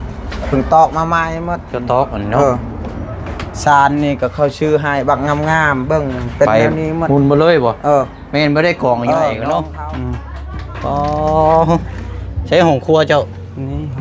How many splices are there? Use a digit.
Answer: 1